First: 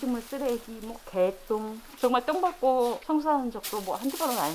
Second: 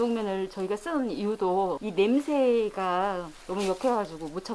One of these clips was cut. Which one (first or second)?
second